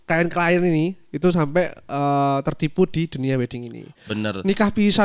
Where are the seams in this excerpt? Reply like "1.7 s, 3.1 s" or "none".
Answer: none